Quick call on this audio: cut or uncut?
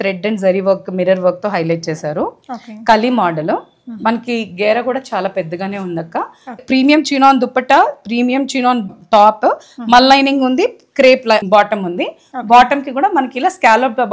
cut